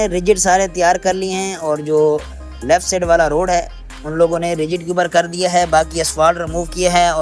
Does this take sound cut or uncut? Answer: uncut